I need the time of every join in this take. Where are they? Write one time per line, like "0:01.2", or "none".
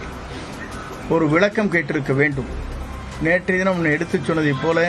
none